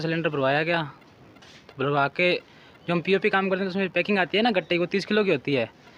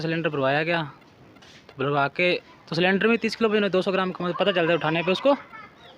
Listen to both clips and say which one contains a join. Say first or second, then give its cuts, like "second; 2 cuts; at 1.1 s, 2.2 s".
second; 1 cut; at 2.6 s